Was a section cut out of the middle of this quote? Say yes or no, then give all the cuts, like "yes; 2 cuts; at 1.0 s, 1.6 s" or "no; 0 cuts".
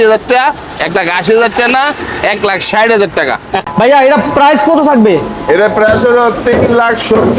yes; 1 cut; at 3.6 s